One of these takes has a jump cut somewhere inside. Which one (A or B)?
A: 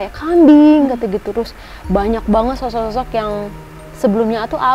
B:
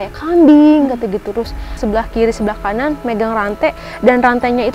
B